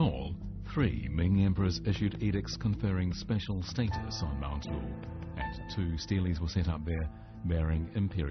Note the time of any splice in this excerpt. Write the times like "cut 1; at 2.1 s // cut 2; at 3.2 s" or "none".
none